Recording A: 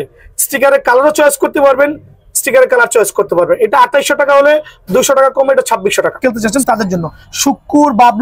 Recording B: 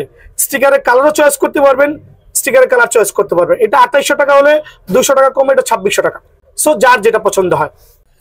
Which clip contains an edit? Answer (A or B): A